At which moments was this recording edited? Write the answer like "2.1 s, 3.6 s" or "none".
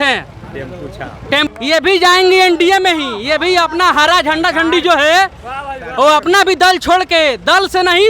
1.5 s